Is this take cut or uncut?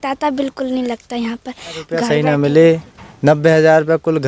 cut